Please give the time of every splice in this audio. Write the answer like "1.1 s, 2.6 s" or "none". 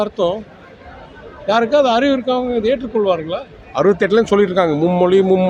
3.6 s